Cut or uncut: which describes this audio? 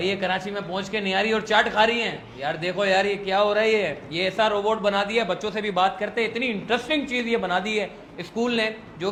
uncut